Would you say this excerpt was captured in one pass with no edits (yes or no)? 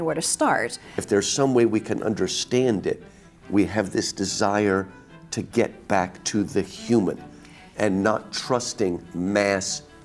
no